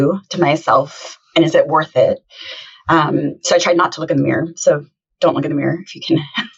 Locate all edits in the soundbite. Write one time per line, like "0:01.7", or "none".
none